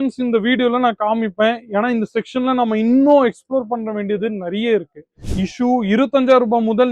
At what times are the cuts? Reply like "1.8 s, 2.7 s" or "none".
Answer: 5.0 s

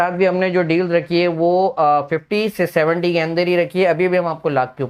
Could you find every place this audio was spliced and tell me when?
none

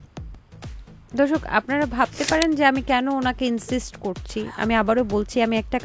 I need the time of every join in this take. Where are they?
1.0 s

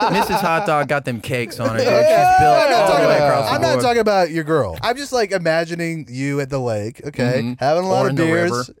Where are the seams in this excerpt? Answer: 4.7 s

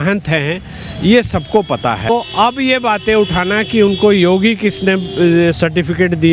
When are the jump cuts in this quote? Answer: 2.1 s

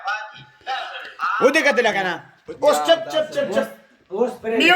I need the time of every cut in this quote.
1.0 s

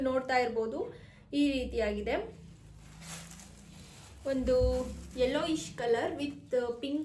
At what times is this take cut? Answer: none

